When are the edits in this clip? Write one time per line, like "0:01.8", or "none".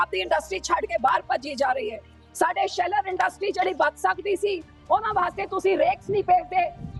none